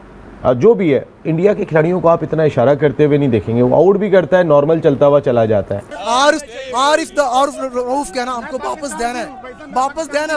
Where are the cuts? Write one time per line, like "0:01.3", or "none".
0:05.9